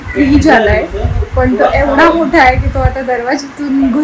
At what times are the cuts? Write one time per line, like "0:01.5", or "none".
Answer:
none